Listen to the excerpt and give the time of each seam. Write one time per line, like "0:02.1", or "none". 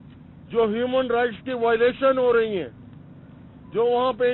none